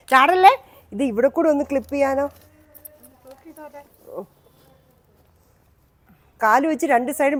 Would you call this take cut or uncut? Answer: uncut